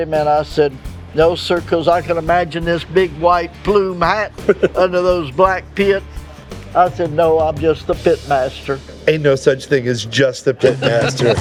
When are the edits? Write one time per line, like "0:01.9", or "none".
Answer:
none